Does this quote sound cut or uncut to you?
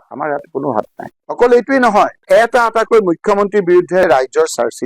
cut